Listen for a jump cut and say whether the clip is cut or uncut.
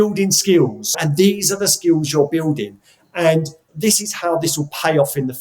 cut